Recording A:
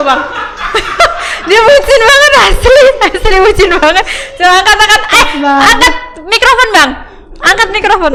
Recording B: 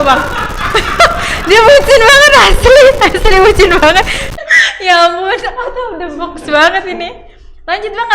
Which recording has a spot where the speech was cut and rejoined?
B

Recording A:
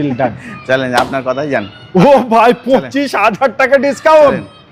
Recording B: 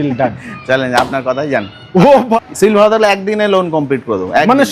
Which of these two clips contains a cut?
B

